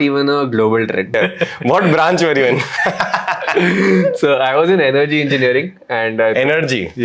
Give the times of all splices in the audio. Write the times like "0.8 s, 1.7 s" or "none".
1.1 s